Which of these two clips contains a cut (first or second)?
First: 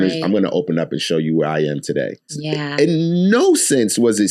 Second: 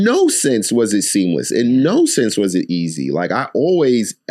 first